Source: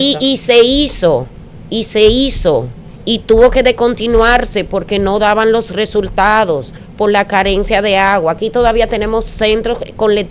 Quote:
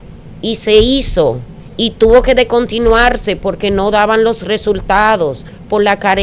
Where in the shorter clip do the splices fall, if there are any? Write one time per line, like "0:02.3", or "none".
none